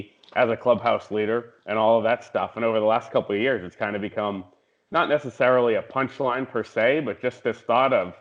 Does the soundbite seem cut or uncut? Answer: uncut